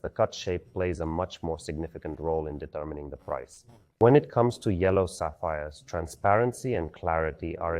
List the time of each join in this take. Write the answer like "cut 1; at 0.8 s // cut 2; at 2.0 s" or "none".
cut 1; at 4.0 s